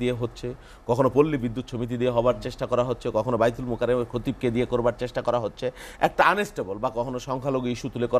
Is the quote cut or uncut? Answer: uncut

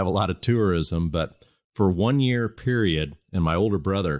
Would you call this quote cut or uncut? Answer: uncut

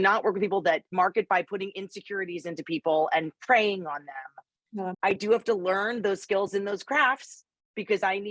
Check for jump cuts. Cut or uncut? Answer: cut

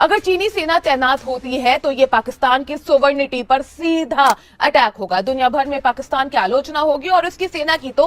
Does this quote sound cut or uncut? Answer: uncut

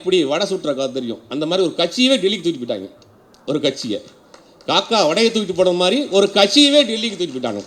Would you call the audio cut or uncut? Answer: uncut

